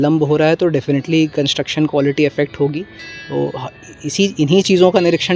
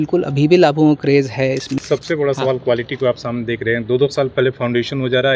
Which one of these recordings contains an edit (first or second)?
second